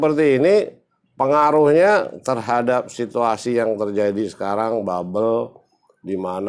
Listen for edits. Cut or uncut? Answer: uncut